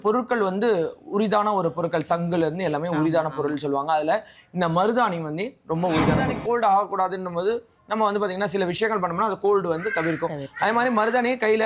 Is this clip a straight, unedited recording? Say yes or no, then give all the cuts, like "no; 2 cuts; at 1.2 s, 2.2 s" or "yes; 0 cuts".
no; 1 cut; at 6.3 s